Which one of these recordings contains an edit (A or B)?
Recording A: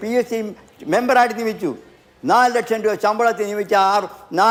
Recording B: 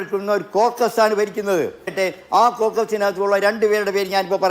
B